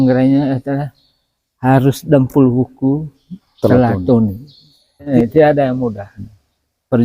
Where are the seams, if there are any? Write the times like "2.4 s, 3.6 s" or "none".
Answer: 5.1 s